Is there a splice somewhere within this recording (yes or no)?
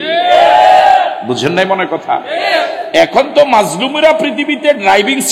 no